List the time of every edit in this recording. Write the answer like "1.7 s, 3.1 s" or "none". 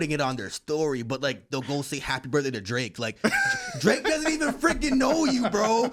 none

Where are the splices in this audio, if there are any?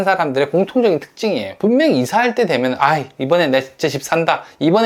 1.5 s

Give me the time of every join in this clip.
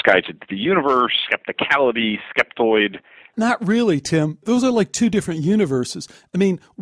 3.3 s, 4.4 s

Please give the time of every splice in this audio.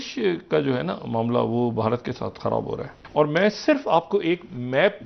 none

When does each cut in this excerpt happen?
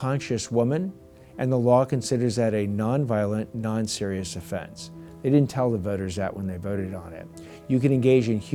none

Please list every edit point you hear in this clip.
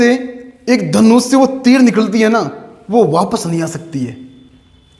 none

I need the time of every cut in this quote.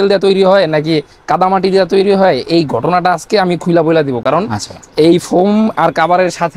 none

